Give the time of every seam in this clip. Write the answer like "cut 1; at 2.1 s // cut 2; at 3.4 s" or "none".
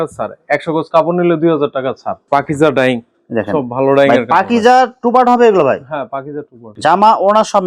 cut 1; at 2.1 s // cut 2; at 6.6 s